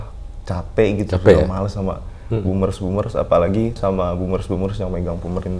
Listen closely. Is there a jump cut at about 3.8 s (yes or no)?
yes